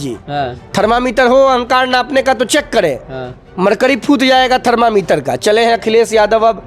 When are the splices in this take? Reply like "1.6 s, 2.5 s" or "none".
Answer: none